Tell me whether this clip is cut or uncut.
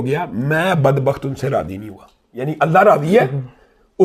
uncut